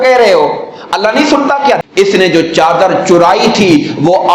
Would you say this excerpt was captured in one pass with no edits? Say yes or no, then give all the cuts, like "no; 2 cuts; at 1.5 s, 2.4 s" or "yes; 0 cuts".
no; 1 cut; at 1.9 s